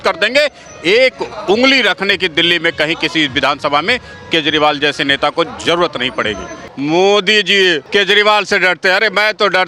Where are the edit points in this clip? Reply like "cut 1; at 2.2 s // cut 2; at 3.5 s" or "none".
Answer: cut 1; at 6.5 s // cut 2; at 7.8 s